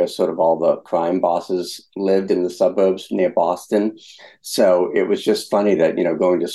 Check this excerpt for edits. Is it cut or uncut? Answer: cut